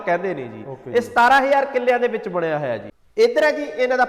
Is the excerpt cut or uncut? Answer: cut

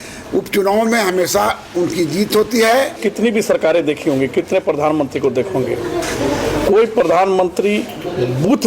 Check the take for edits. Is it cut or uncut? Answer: cut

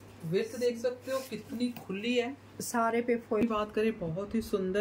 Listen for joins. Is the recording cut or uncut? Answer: cut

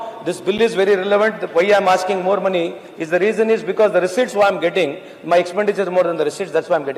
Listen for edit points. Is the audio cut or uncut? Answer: uncut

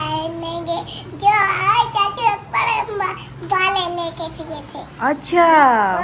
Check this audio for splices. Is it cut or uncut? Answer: uncut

